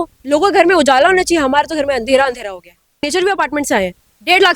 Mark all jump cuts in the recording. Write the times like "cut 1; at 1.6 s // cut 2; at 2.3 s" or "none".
cut 1; at 3.1 s